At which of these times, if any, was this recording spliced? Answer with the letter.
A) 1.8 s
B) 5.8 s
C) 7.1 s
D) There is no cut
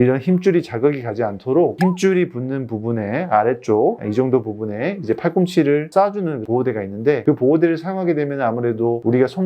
A